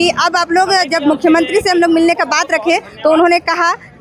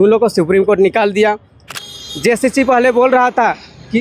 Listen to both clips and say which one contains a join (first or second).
second